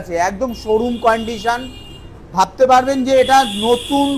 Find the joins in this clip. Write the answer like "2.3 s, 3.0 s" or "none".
none